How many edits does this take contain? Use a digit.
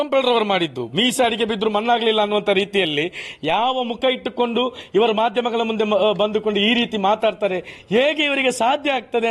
0